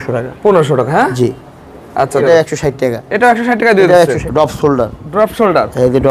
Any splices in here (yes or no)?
yes